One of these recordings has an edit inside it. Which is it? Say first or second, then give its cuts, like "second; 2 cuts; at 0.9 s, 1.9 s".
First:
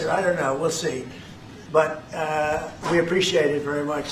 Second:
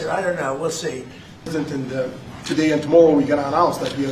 second; 1 cut; at 1.5 s